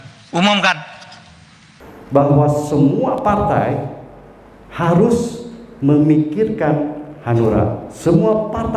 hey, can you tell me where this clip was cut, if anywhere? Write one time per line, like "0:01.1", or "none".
0:01.8